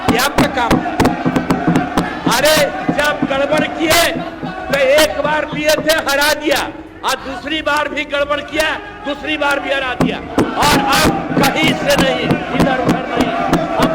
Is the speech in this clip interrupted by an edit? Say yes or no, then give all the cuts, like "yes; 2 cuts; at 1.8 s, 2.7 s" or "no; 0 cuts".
no; 0 cuts